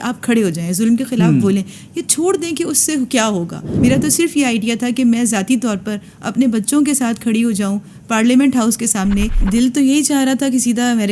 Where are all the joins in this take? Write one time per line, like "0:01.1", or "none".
0:03.7
0:09.4